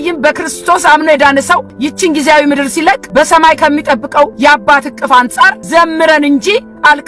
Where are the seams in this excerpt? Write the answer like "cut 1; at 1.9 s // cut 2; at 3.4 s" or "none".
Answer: cut 1; at 1.7 s // cut 2; at 3.0 s // cut 3; at 4.3 s // cut 4; at 5.6 s